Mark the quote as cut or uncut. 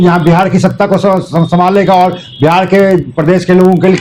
uncut